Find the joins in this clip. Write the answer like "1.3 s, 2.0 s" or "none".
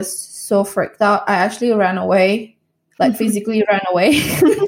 none